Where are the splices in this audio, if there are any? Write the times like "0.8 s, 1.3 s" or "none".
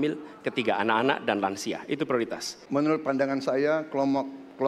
2.5 s